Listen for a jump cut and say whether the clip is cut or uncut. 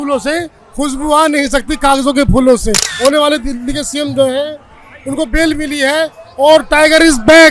cut